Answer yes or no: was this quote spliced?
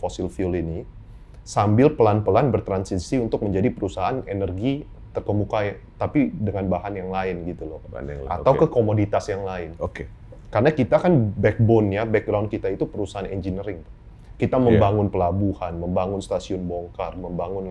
no